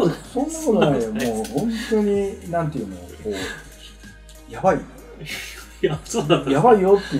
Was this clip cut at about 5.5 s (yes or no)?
no